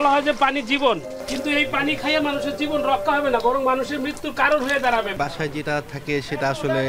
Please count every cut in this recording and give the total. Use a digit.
2